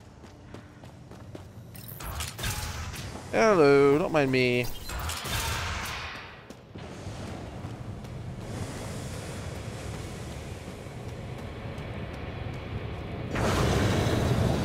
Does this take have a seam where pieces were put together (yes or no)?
yes